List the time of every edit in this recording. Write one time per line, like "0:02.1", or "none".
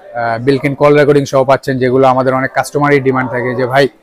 none